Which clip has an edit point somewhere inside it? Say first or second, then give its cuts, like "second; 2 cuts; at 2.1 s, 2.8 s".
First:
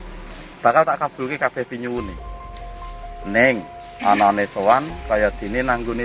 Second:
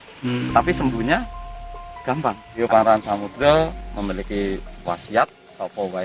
second; 1 cut; at 2.6 s